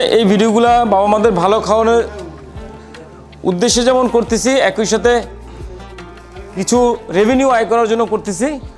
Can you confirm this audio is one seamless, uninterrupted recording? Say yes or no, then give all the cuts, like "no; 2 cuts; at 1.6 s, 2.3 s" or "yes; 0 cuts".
yes; 0 cuts